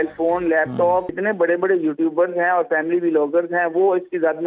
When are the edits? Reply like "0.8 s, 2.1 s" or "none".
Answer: 1.1 s